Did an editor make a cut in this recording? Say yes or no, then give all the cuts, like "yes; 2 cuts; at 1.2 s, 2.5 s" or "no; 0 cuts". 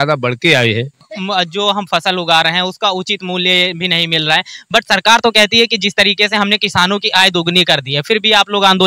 yes; 1 cut; at 1.1 s